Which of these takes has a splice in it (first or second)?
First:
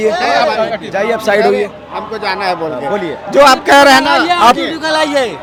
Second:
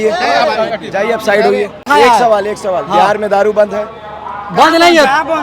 second